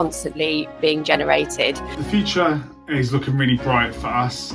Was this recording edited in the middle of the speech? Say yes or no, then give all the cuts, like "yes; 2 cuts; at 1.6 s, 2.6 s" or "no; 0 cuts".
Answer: yes; 1 cut; at 1.9 s